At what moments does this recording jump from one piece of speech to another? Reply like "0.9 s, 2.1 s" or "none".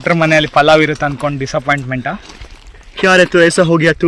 none